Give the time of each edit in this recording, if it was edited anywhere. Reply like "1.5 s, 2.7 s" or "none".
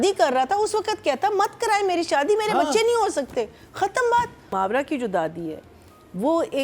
4.5 s